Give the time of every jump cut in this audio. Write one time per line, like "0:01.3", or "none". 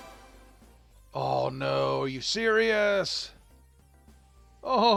none